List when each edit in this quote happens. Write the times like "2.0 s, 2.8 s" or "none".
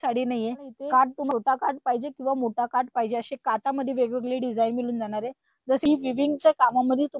1.3 s, 5.8 s